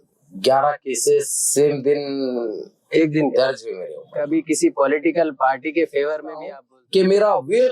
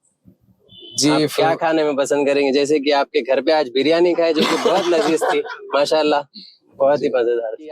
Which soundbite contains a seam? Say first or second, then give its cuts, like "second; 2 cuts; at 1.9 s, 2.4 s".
first; 2 cuts; at 3.7 s, 6.5 s